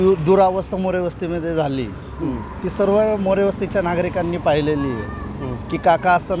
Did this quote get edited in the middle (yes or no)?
no